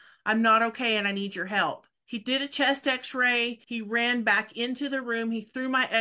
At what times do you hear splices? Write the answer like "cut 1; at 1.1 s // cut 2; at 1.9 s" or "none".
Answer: cut 1; at 1.9 s // cut 2; at 3.6 s